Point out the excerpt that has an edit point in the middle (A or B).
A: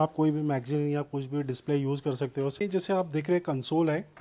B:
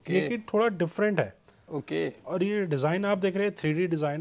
A